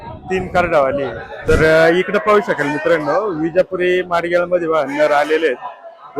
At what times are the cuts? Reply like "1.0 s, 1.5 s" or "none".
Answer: 1.3 s